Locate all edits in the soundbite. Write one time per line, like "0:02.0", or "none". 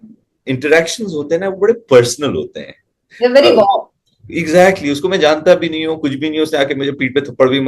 none

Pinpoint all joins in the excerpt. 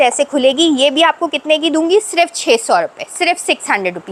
none

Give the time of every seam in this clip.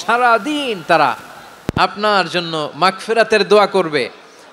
none

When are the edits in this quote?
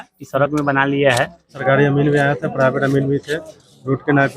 0:01.6

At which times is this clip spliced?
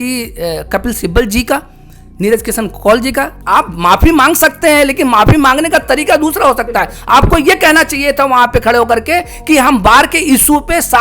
0:03.4

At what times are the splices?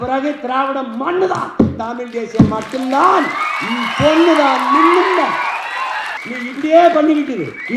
0:06.2

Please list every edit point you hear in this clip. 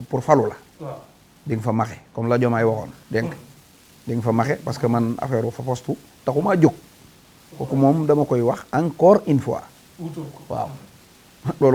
none

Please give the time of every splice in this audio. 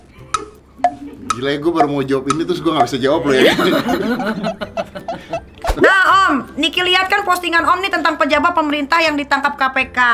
0:06.0

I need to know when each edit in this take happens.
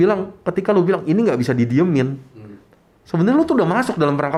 none

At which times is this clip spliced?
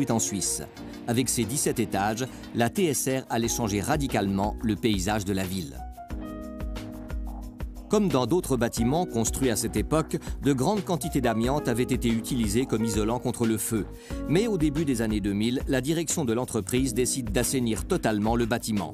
0:05.0

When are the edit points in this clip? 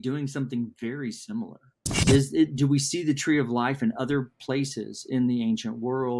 0:01.9

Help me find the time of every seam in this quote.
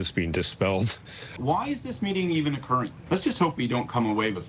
0:01.4
0:03.0

